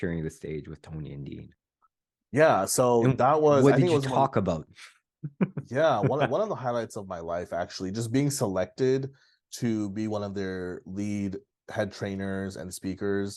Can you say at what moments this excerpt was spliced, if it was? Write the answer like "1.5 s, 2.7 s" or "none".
none